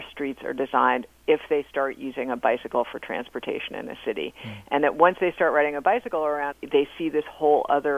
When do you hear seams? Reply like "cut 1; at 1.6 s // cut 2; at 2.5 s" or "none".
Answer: cut 1; at 6.6 s